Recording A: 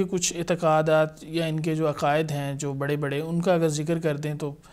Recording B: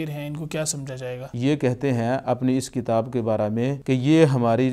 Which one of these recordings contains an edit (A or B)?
B